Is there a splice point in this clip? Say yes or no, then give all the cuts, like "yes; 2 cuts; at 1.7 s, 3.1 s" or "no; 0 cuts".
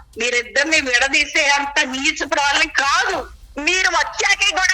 yes; 1 cut; at 3.3 s